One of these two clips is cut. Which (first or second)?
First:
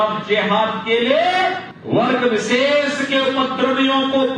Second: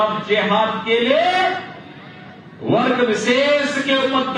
first